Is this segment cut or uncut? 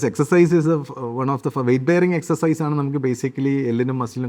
uncut